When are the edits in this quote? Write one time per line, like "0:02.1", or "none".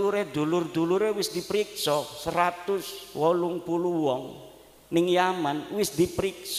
none